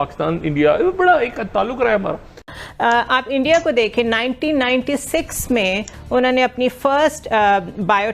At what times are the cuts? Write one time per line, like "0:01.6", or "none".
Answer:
0:02.5